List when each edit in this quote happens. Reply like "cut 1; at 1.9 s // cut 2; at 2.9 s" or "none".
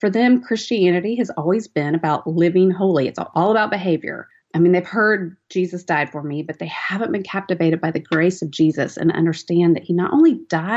cut 1; at 3.3 s